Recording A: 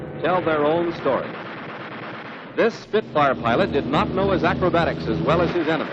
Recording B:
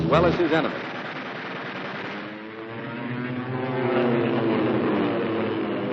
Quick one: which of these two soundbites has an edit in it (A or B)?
A